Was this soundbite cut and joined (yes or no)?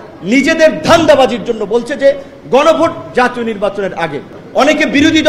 yes